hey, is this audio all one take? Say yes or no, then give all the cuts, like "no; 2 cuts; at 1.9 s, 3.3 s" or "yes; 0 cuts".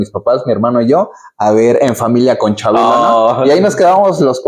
no; 1 cut; at 3.1 s